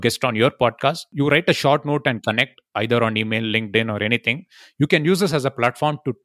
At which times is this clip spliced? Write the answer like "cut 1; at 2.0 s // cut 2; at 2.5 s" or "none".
cut 1; at 1.1 s